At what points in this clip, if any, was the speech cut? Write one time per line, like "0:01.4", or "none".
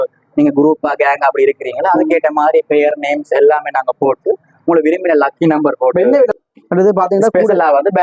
0:06.3